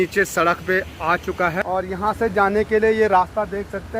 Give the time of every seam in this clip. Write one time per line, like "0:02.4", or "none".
0:01.6